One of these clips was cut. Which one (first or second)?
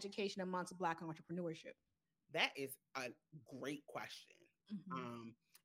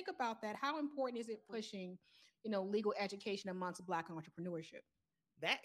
second